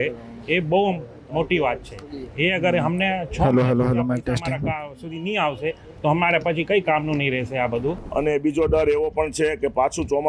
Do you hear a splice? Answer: yes; 1 cut; at 8.0 s

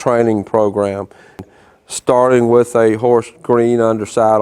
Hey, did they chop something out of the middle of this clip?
yes; 1 cut; at 1.4 s

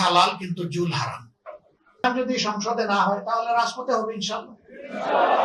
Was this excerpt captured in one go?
no; 1 cut; at 2.0 s

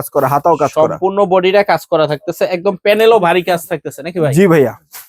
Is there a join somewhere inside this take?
no; 0 cuts

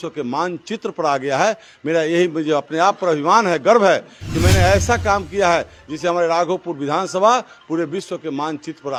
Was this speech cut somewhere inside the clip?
no; 0 cuts

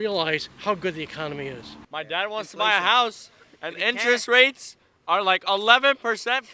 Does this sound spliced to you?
no; 0 cuts

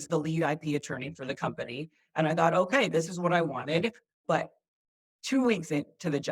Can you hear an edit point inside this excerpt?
yes; 1 cut; at 4.1 s

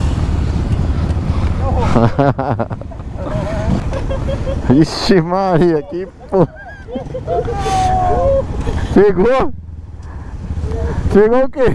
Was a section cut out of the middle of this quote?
yes; 1 cut; at 3.8 s

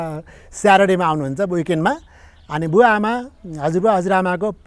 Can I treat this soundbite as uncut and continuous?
yes; 0 cuts

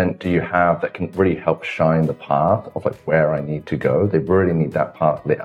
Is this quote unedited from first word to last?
yes; 0 cuts

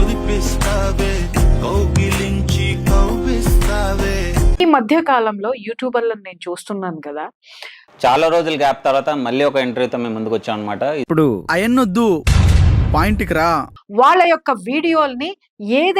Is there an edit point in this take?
yes; 2 cuts; at 4.6 s, 13.8 s

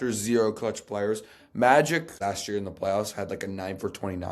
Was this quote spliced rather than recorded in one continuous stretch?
yes; 1 cut; at 2.1 s

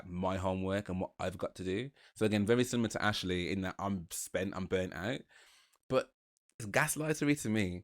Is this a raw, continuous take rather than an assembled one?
no; 1 cut; at 6.7 s

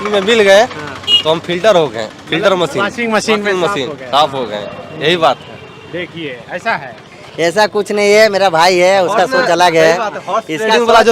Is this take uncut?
yes; 0 cuts

